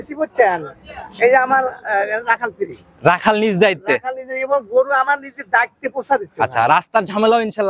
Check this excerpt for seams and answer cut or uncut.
uncut